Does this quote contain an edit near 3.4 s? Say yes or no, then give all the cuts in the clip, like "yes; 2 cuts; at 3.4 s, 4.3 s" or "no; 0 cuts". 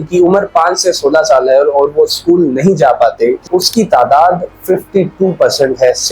yes; 1 cut; at 3.4 s